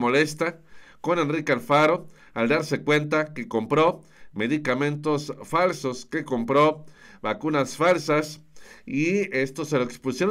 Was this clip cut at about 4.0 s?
no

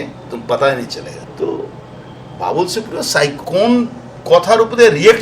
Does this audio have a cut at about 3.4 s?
yes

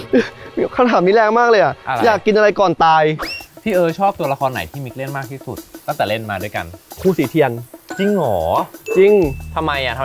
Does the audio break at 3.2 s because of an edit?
yes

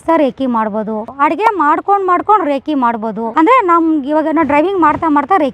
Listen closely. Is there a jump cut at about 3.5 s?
no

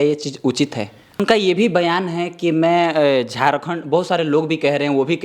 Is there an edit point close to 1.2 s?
yes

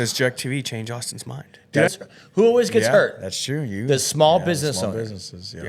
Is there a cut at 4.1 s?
no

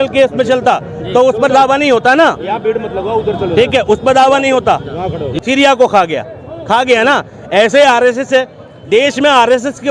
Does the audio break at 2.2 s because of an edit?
no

